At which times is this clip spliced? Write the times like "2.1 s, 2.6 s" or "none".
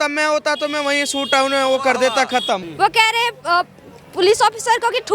2.7 s

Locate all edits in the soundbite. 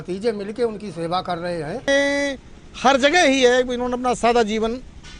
1.9 s

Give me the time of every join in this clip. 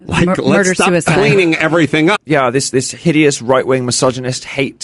none

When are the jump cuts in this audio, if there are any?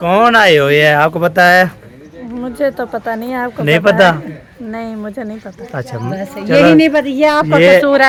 none

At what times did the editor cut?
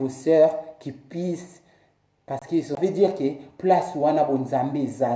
2.8 s

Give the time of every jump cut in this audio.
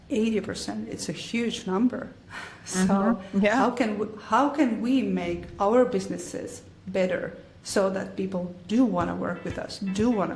none

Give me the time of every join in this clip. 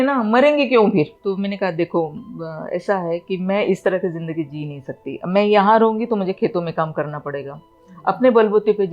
1.1 s

